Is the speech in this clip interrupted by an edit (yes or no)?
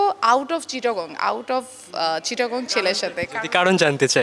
no